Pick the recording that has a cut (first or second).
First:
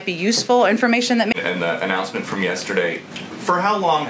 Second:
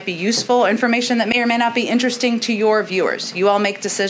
first